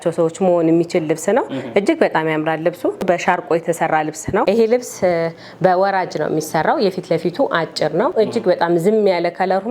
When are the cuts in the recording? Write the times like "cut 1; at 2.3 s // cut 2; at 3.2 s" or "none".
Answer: cut 1; at 3.1 s // cut 2; at 4.4 s // cut 3; at 8.1 s